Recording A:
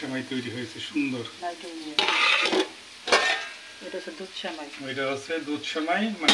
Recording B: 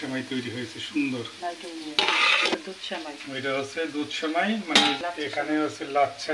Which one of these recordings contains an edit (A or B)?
B